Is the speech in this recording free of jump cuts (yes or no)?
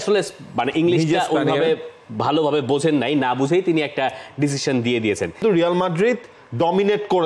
no